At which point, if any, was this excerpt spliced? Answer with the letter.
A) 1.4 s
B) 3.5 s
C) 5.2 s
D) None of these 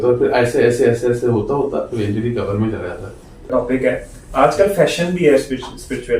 B